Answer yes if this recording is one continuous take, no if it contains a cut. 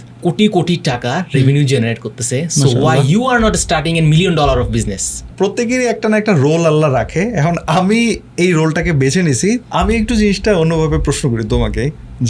yes